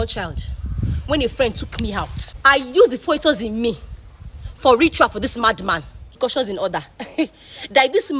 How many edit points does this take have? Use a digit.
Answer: 2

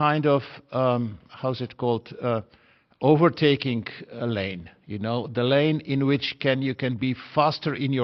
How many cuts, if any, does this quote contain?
0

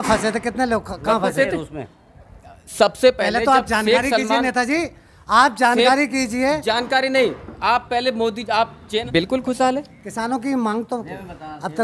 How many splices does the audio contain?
1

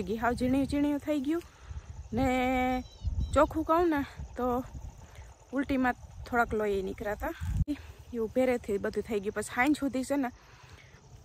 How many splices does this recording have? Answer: 1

